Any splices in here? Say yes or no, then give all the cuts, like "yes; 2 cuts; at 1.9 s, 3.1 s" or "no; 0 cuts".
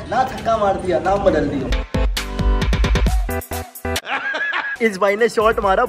no; 0 cuts